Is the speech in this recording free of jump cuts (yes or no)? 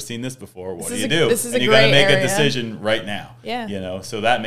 yes